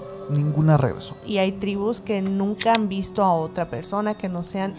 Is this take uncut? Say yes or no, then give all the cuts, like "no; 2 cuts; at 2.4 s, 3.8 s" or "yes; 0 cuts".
no; 1 cut; at 1.2 s